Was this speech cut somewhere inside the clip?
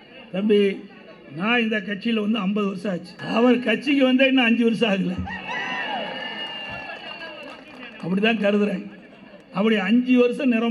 yes; 1 cut; at 3.1 s

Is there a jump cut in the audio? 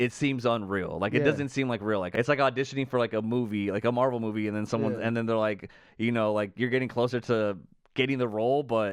yes; 1 cut; at 2.1 s

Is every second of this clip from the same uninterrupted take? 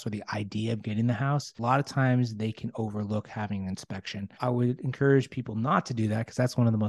no; 2 cuts; at 1.6 s, 4.2 s

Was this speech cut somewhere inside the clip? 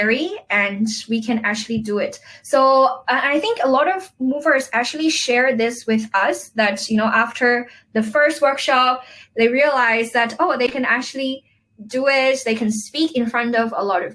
no; 0 cuts

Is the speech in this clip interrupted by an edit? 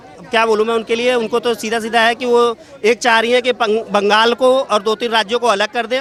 no; 0 cuts

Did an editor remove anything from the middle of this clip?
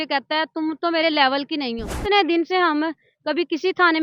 yes; 1 cut; at 1.9 s

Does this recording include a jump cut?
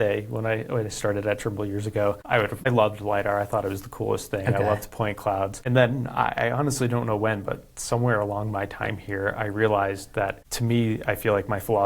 yes; 3 cuts; at 2.5 s, 5.6 s, 10.5 s

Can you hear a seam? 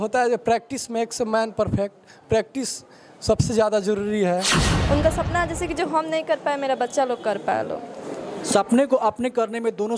yes; 1 cut; at 4.7 s

